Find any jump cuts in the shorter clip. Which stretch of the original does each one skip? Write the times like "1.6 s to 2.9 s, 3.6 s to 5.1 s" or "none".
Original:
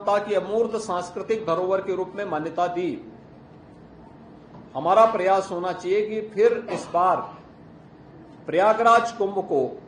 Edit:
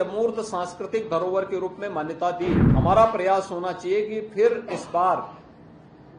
3.0 s to 4.7 s